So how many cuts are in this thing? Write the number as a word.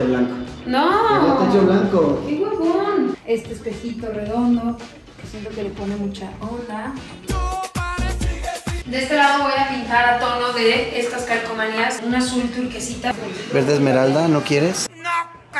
three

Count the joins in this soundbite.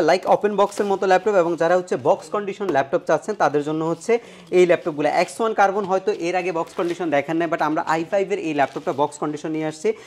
zero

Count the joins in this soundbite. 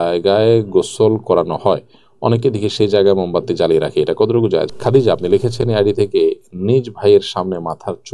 one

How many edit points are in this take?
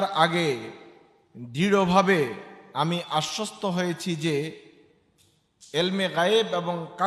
zero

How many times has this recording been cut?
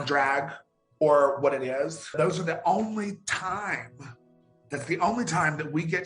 one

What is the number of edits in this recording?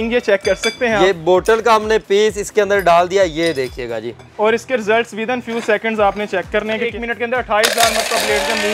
one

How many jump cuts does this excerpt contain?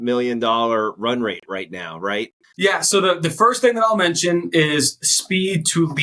one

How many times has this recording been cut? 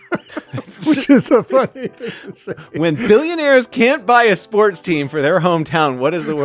zero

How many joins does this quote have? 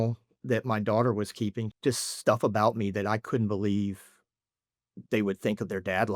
one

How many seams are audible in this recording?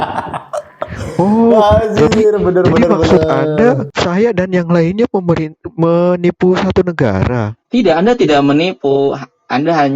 one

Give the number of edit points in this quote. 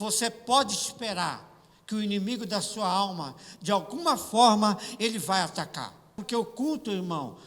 one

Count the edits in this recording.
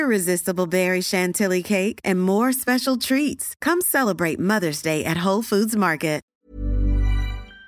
one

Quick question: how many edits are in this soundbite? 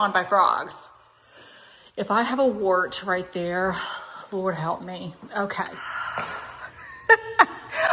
one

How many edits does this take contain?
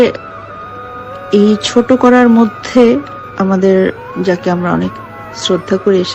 two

